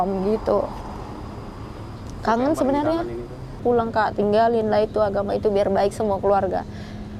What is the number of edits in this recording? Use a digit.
1